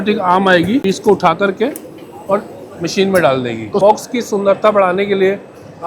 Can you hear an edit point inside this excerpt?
yes; 2 cuts; at 0.8 s, 3.8 s

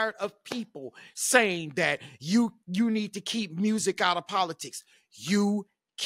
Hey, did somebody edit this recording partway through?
no; 0 cuts

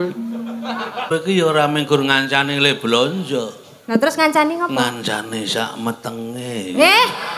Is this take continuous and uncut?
no; 1 cut; at 1.1 s

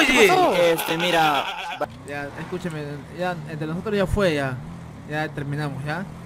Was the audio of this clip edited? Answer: yes; 1 cut; at 1.8 s

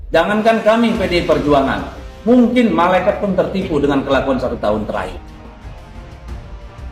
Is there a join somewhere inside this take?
no; 0 cuts

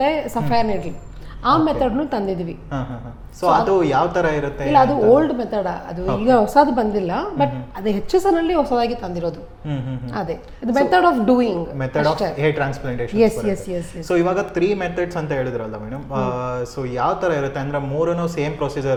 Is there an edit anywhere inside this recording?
no; 0 cuts

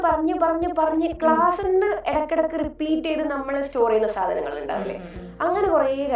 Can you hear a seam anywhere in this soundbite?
no; 0 cuts

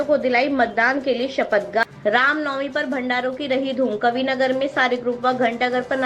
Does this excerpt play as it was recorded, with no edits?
no; 1 cut; at 1.8 s

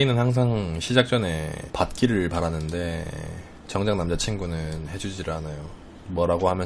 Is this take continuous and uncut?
yes; 0 cuts

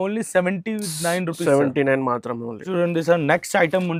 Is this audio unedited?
yes; 0 cuts

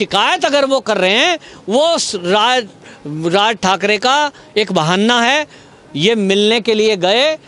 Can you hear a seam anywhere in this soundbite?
no; 0 cuts

